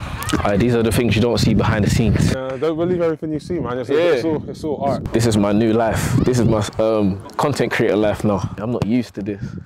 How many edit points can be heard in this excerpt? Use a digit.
3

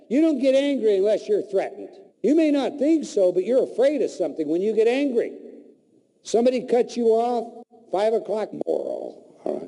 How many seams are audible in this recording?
0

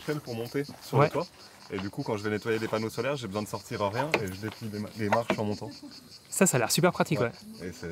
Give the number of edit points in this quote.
0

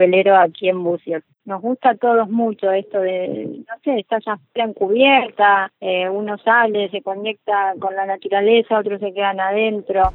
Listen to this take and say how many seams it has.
1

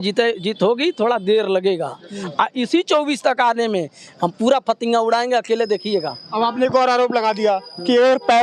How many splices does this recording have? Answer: 0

